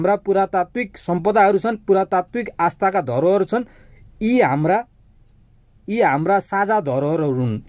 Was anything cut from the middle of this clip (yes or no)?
no